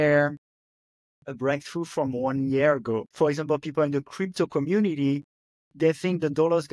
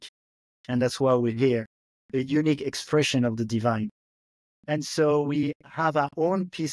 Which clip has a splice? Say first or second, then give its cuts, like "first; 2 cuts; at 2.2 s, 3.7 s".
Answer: first; 1 cut; at 3.1 s